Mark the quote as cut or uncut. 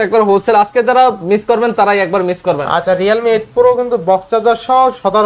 uncut